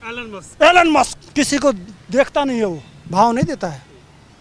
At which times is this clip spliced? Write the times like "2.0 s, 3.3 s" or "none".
1.2 s

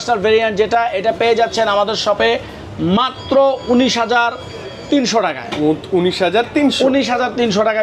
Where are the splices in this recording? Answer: none

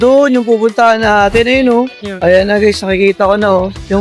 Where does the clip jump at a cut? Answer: 2.2 s

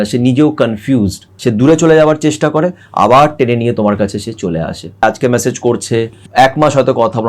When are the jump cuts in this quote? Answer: 1.2 s, 5.0 s, 6.2 s

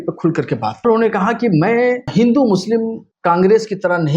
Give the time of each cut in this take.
0.8 s, 2.1 s, 3.1 s

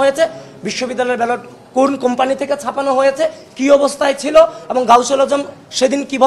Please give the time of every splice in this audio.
none

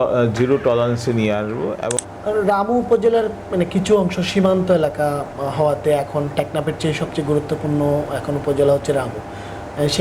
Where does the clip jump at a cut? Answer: 2.0 s

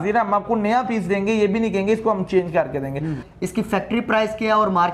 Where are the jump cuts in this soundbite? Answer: 3.2 s

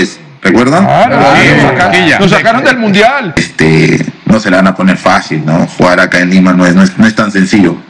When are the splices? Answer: 3.4 s

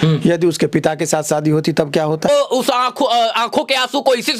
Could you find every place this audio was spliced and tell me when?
2.3 s

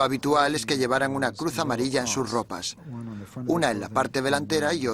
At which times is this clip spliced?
1.8 s

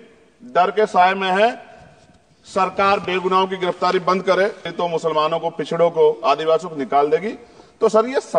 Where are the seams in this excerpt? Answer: 4.7 s

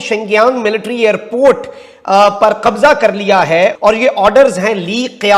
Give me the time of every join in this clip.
3.7 s

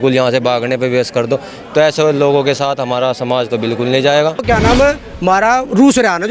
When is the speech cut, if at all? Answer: 4.4 s

